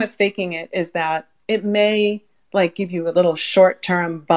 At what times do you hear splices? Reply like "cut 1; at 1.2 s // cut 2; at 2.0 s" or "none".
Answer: none